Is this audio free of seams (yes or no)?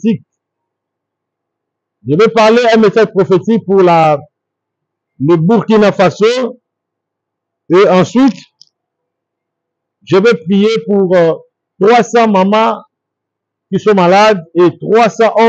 yes